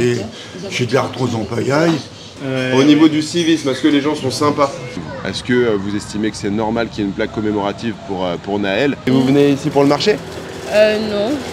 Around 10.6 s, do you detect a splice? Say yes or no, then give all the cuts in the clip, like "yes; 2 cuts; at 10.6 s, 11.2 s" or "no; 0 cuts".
no; 3 cuts; at 2.4 s, 4.9 s, 9.0 s